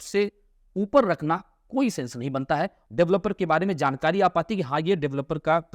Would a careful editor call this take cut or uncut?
cut